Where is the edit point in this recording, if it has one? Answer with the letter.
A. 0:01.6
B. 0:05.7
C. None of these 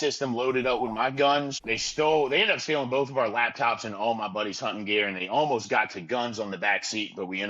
A